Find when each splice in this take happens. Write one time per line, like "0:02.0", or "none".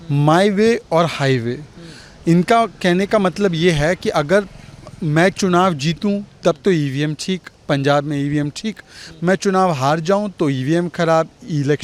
none